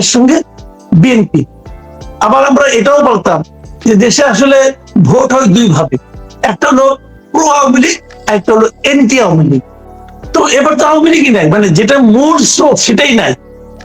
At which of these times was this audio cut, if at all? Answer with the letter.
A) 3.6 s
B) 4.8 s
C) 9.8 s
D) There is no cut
C